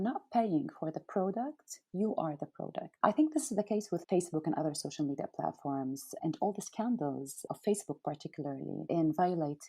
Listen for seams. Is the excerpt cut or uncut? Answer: uncut